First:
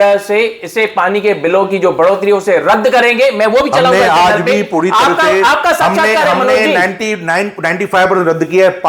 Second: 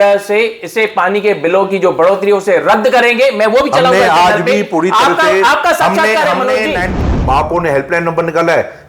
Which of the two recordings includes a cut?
second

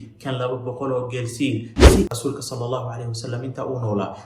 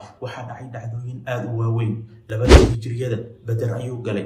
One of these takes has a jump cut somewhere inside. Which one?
first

